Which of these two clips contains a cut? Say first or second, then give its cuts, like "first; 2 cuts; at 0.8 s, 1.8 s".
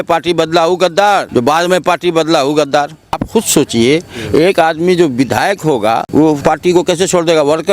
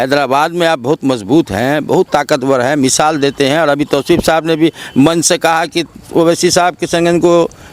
first; 3 cuts; at 1.3 s, 3.2 s, 6.2 s